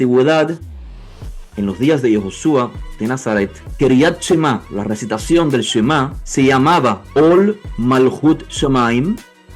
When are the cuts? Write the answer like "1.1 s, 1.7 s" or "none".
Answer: 3.6 s, 4.7 s, 6.2 s, 7.0 s